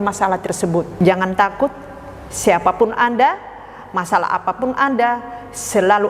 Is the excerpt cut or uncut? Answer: cut